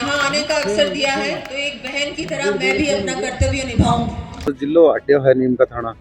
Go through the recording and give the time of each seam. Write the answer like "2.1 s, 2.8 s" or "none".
4.5 s